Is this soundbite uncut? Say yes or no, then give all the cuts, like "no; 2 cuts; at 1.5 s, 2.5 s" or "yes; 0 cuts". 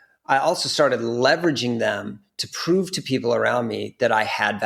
yes; 0 cuts